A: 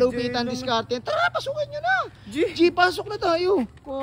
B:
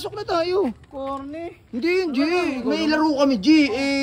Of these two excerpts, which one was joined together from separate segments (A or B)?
B